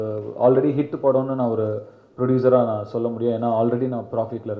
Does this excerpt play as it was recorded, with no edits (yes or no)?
yes